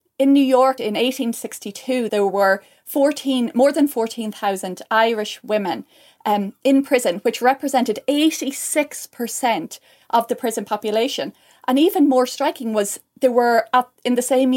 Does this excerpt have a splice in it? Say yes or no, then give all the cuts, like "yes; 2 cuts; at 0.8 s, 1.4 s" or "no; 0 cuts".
yes; 2 cuts; at 0.8 s, 2.1 s